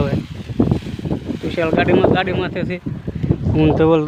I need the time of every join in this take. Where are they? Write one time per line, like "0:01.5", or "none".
none